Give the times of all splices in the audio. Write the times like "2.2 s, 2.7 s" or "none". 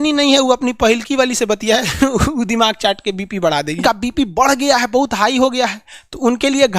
3.8 s